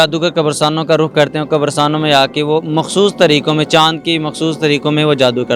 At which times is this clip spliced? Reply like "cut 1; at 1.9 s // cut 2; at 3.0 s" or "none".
none